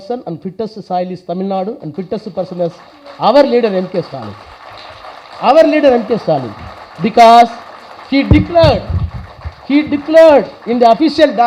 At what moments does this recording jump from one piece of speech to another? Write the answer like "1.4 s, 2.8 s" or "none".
none